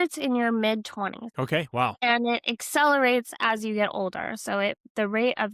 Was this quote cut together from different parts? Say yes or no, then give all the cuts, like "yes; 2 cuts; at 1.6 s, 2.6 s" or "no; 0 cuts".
yes; 2 cuts; at 1.2 s, 2.0 s